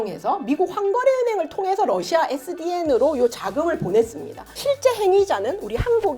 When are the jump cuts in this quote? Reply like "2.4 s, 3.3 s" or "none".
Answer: 4.5 s